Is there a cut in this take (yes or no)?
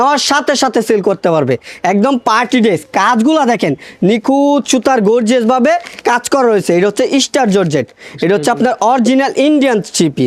no